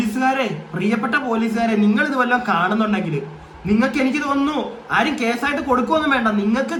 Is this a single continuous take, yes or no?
yes